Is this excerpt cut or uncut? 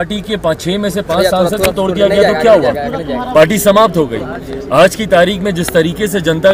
uncut